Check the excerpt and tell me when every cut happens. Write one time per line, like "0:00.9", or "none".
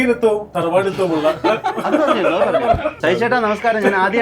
0:03.0